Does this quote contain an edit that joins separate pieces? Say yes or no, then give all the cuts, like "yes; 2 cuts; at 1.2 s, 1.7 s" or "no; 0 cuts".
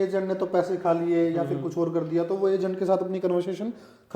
no; 0 cuts